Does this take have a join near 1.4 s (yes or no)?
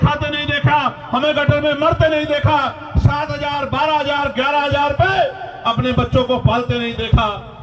no